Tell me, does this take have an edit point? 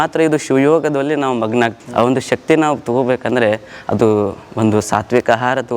yes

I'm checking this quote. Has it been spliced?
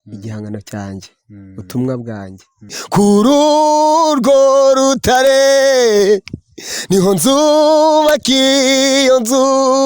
yes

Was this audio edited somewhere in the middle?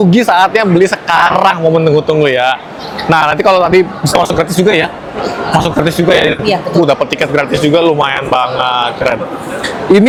no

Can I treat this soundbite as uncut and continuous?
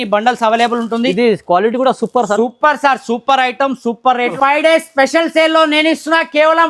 no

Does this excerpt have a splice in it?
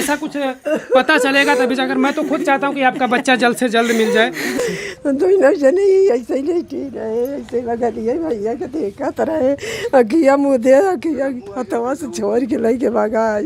yes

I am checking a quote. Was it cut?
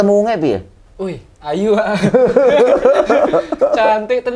no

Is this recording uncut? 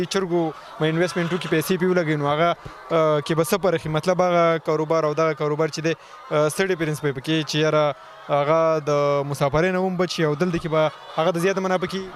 yes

